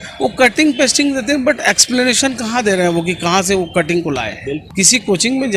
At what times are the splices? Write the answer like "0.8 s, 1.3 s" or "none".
4.6 s

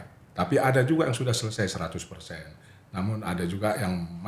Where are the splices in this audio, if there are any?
none

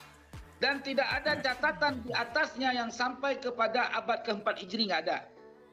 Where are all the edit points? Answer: none

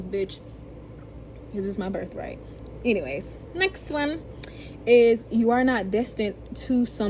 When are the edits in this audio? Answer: none

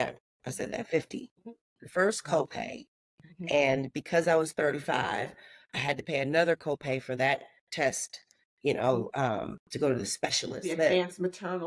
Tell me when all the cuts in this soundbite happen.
10.5 s

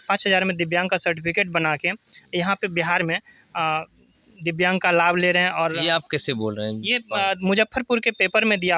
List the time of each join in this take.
none

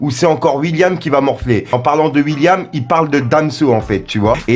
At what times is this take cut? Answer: none

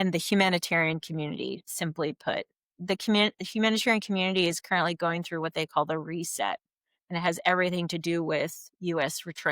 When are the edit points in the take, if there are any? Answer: 1.7 s

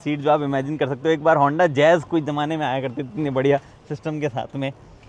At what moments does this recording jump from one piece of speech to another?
none

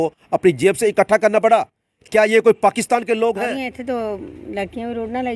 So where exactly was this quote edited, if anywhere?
3.5 s

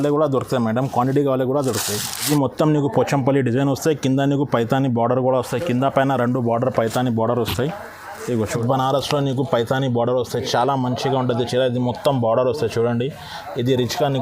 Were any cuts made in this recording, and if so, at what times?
2.2 s, 8.6 s

